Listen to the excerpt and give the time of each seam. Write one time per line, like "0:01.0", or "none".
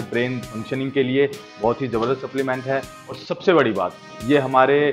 none